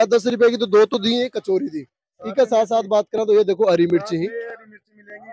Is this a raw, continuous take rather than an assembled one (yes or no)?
yes